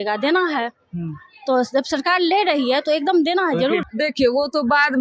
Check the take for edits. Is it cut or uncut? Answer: cut